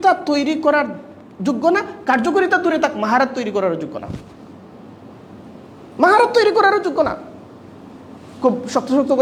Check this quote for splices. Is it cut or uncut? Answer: uncut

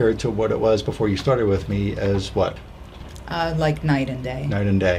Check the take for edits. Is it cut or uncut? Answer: uncut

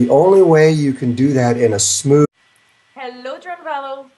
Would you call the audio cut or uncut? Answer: uncut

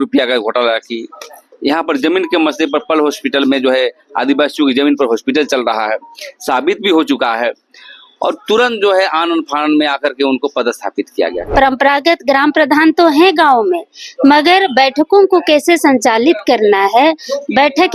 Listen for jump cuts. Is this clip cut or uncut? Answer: cut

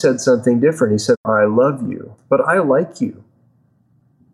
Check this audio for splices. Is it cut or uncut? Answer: cut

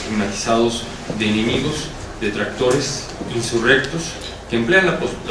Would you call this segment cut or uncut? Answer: cut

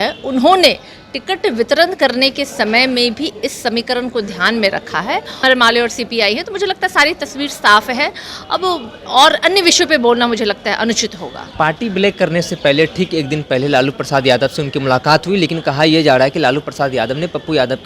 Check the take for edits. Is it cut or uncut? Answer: cut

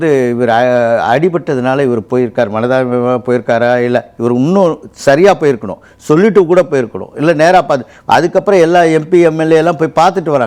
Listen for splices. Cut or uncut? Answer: uncut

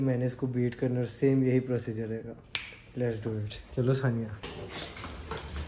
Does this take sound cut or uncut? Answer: cut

